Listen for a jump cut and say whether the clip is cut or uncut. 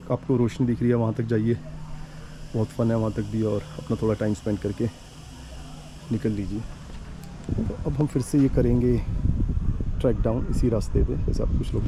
uncut